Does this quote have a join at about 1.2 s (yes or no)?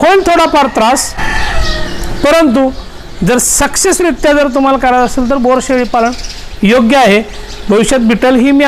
no